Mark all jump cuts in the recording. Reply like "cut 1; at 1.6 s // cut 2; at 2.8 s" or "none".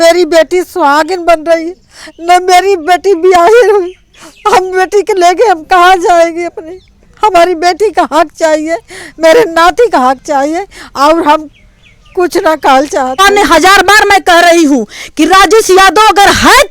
cut 1; at 13.2 s